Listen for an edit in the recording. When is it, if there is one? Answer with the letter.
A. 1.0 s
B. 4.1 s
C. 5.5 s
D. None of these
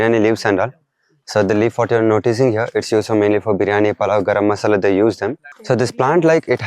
C